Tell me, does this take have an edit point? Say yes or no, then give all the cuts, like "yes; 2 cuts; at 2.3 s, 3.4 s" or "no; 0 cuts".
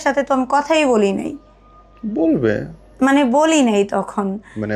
no; 0 cuts